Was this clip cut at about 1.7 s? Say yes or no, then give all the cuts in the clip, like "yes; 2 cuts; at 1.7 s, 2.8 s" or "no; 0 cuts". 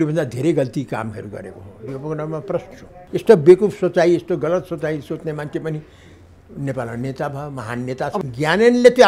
no; 2 cuts; at 2.9 s, 8.2 s